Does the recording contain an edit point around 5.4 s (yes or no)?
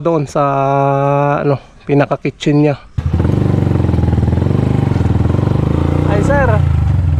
no